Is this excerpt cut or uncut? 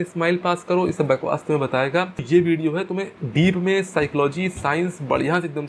cut